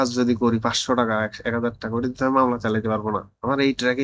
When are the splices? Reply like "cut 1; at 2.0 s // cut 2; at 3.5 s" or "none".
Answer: none